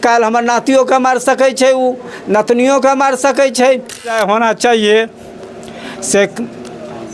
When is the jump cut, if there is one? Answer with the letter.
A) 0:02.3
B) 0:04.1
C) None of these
B